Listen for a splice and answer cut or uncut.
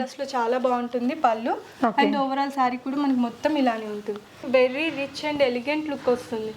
cut